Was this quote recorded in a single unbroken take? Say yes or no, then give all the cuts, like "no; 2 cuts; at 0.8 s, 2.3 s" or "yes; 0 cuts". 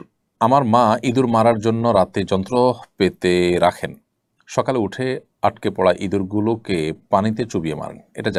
yes; 0 cuts